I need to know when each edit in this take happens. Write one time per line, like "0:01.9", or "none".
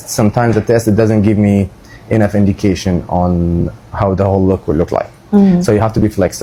none